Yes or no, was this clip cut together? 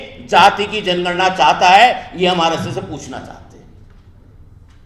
no